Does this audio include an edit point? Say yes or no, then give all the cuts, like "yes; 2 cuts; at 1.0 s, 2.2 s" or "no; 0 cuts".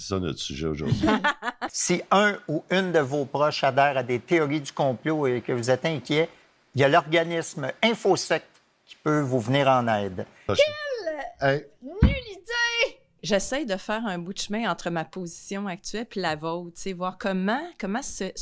yes; 2 cuts; at 1.6 s, 13.2 s